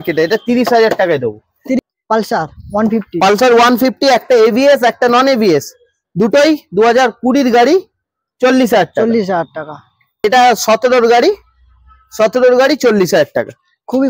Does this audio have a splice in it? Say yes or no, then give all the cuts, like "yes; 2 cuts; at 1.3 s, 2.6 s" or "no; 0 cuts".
yes; 2 cuts; at 1.8 s, 10.2 s